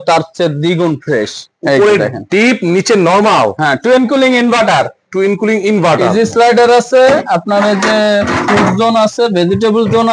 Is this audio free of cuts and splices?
yes; 0 cuts

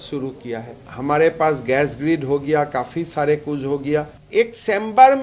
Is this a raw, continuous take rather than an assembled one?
no; 2 cuts; at 0.8 s, 4.2 s

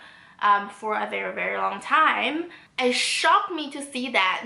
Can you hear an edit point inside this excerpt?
yes; 1 cut; at 2.6 s

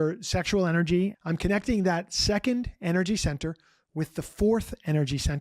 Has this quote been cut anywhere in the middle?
yes; 1 cut; at 1.2 s

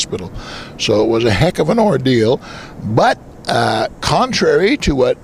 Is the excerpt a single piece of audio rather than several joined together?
yes; 0 cuts

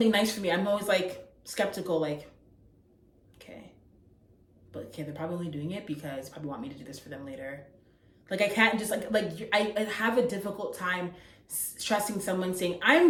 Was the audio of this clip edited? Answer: no; 0 cuts

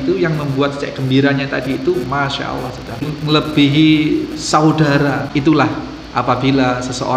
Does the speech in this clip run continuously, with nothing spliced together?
no; 2 cuts; at 3.0 s, 5.3 s

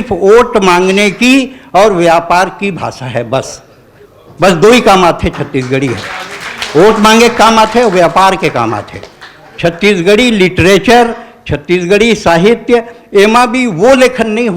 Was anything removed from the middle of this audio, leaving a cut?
no; 0 cuts

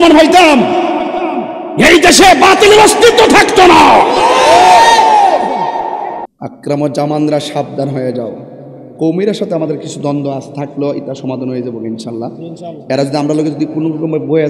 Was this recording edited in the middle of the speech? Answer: yes; 1 cut; at 6.2 s

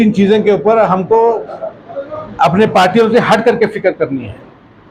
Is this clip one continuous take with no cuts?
yes; 0 cuts

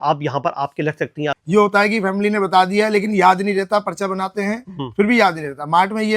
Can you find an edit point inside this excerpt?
yes; 1 cut; at 1.3 s

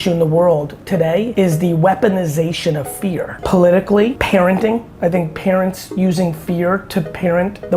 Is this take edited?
yes; 4 cuts; at 1.0 s, 3.4 s, 4.2 s, 4.9 s

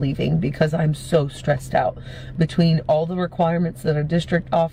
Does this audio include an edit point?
no; 0 cuts

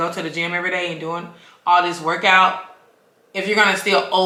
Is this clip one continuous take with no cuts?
yes; 0 cuts

